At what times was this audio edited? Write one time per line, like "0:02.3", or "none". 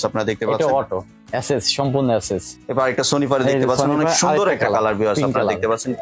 0:01.2
0:02.5